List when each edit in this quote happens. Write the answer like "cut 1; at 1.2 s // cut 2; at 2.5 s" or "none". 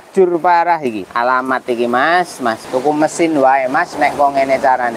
cut 1; at 1.1 s